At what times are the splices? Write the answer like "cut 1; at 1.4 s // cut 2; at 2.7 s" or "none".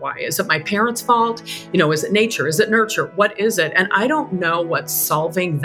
none